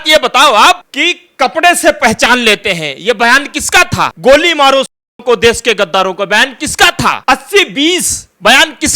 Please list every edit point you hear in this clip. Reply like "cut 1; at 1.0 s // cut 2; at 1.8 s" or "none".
cut 1; at 0.9 s // cut 2; at 4.1 s // cut 3; at 7.2 s